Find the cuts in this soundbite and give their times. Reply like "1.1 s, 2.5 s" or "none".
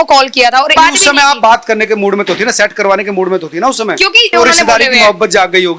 0.7 s, 4.2 s